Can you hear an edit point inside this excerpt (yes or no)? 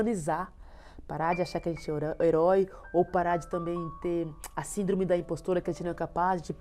no